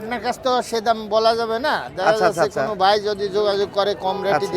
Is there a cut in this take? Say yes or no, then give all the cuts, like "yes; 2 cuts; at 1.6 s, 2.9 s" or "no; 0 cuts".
no; 0 cuts